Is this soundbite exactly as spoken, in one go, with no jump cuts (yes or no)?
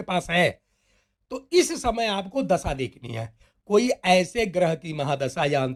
yes